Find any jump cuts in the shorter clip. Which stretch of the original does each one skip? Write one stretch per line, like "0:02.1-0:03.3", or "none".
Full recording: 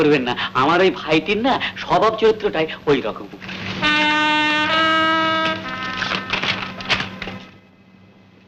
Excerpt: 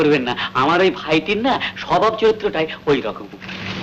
none